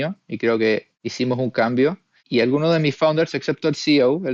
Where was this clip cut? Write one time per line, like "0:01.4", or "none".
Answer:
0:01.0
0:02.2

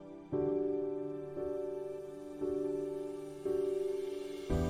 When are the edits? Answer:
none

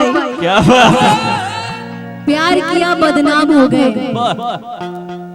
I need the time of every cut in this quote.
0:02.1

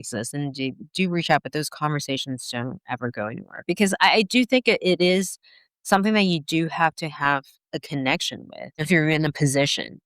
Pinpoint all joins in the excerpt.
0:08.8

